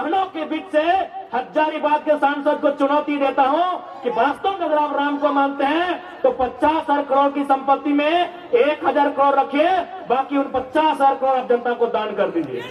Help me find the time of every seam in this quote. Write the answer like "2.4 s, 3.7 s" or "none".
none